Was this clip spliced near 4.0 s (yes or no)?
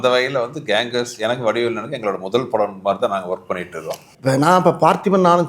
yes